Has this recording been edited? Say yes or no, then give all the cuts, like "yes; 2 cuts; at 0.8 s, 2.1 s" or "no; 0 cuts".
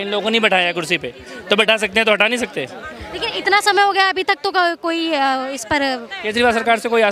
no; 0 cuts